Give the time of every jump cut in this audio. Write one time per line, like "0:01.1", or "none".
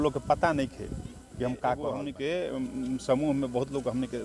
0:02.1